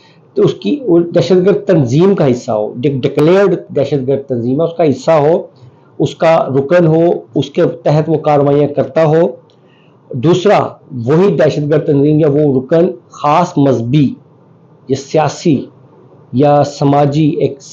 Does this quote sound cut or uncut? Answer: uncut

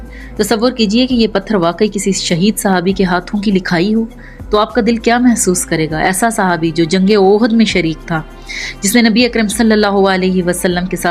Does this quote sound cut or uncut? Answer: uncut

